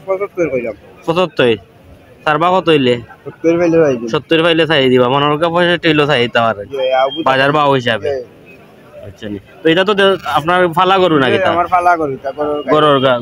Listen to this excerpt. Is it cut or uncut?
uncut